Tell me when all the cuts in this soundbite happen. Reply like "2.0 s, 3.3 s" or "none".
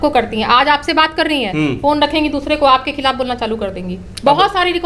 none